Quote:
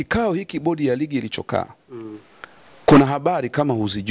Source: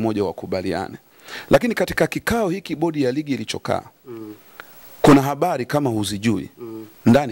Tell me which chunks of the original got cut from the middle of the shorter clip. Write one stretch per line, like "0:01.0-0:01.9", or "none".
none

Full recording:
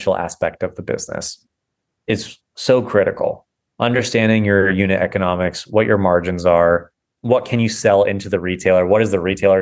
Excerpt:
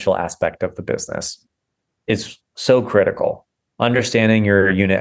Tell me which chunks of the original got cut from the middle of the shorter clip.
none

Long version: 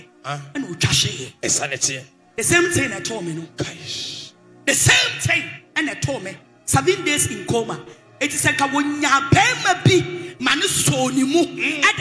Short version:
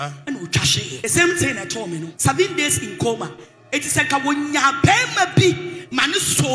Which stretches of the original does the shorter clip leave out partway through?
0:01.2-0:02.3
0:03.4-0:06.6

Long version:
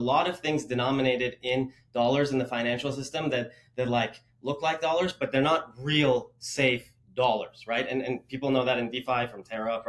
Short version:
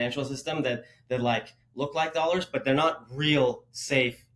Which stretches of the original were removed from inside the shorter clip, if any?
none

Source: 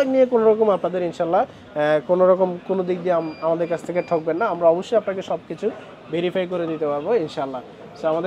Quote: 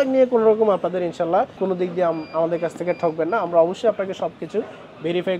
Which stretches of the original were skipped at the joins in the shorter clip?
0:01.5-0:02.6

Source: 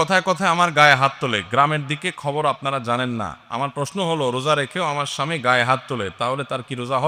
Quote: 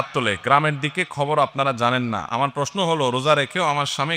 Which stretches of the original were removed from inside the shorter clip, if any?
0:03.3-0:03.4

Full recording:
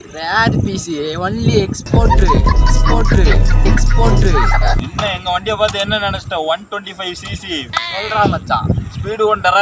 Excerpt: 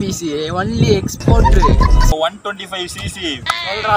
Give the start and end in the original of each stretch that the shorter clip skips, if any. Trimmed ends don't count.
0:02.8-0:06.4

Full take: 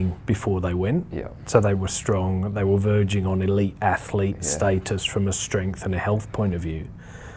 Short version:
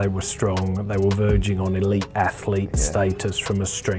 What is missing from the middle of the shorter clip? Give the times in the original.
none

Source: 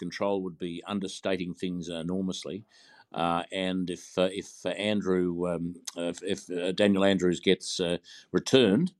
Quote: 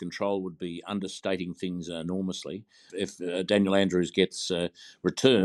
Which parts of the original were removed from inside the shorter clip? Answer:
0:02.9-0:06.2

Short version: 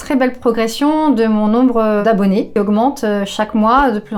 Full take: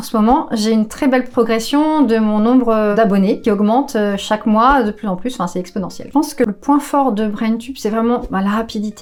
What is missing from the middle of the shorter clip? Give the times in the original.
none

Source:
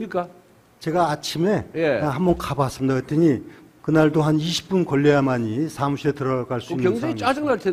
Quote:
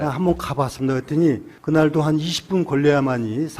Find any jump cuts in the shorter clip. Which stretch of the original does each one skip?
0:03.5-0:03.7

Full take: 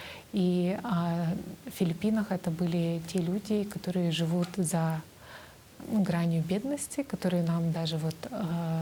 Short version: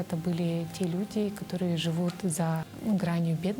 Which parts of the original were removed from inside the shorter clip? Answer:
0:05.0-0:05.8

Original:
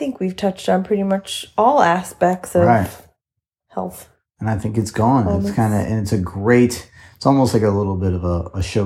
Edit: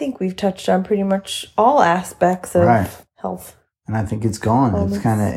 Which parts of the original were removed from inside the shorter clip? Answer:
0:03.0-0:03.6

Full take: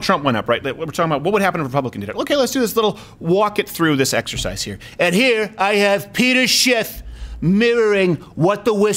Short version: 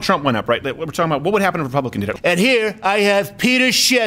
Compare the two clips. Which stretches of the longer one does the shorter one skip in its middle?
0:02.1-0:04.9

